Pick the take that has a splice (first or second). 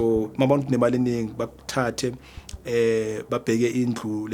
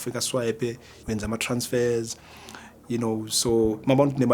second